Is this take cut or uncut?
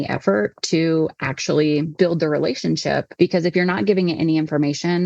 cut